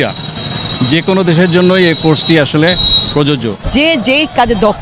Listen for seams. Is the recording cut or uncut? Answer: cut